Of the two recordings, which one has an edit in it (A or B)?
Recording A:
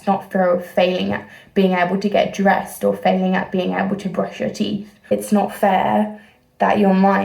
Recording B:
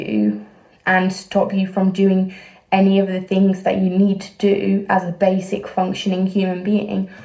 A